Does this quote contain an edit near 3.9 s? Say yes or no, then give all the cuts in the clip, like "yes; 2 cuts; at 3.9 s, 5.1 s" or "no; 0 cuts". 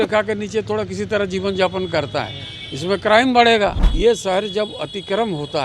yes; 1 cut; at 3.9 s